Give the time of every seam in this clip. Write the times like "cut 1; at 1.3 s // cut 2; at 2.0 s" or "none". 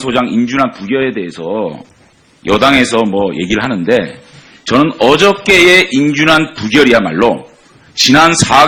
none